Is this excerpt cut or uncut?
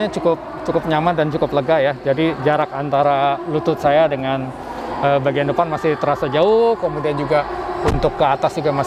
uncut